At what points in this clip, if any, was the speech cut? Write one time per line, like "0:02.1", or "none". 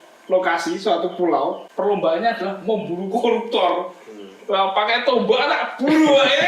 0:01.6